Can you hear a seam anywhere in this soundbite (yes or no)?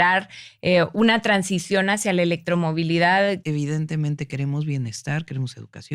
yes